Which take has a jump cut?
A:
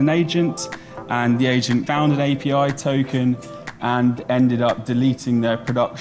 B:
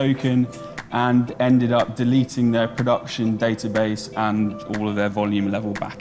A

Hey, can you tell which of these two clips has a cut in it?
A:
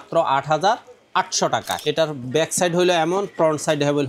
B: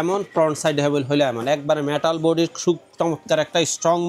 A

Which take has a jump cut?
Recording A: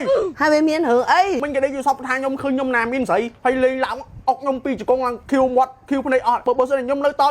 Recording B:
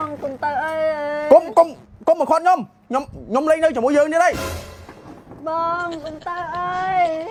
A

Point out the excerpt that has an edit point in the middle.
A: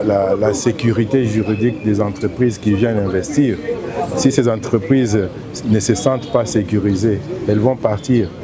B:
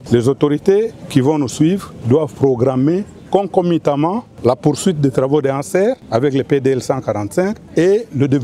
B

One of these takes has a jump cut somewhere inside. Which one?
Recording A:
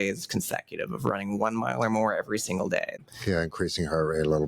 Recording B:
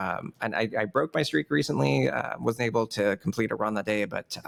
A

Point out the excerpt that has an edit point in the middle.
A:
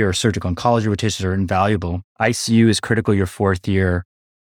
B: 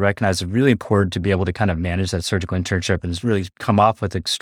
A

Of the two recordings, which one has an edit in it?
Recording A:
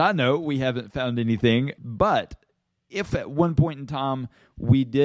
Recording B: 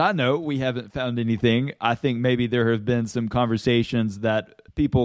A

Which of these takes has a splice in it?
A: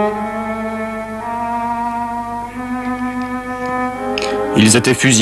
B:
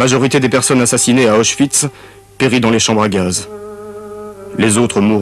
B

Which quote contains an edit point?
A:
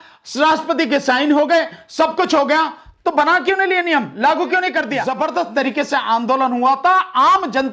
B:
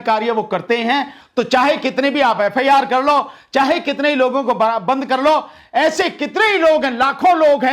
A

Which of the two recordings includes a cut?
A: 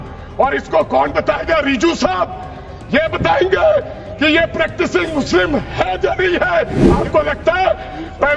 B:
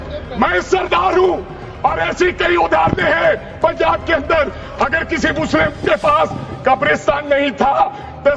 A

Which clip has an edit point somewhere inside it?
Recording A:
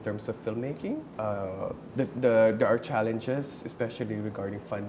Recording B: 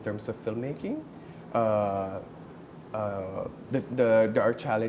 A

